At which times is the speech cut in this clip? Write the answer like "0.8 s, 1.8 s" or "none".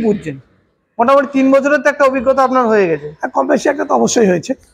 none